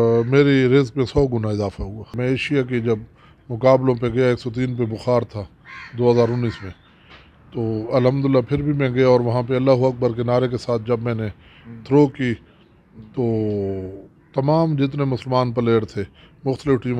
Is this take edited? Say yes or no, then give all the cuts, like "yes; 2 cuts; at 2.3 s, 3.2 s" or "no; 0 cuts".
yes; 1 cut; at 2.1 s